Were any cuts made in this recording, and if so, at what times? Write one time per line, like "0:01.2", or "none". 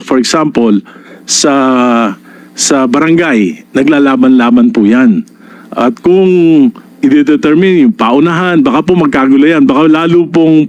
none